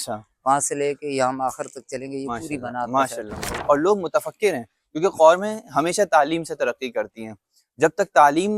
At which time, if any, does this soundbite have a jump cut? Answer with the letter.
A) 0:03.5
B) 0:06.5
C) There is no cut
A